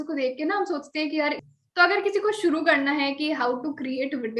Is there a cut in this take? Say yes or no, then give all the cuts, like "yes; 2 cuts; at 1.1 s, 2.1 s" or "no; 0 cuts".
yes; 1 cut; at 1.4 s